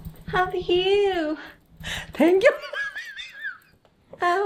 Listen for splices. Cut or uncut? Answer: uncut